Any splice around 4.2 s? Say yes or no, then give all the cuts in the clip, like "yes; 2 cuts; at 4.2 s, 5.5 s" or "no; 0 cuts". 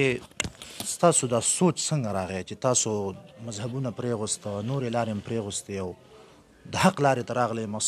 no; 0 cuts